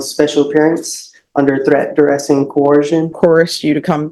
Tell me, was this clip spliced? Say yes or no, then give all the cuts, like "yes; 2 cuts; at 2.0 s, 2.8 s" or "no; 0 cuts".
no; 0 cuts